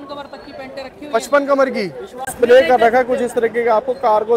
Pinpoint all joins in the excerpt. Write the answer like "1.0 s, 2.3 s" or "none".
2.3 s